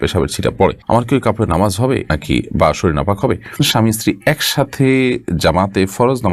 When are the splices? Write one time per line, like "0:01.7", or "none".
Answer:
0:00.8
0:02.1
0:03.6